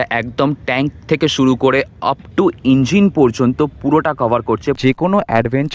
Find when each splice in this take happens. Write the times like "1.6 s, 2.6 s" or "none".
4.8 s